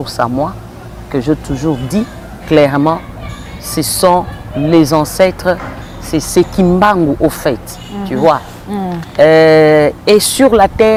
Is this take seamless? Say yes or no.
yes